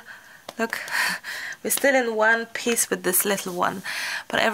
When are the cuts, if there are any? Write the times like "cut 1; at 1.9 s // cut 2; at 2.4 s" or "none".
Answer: none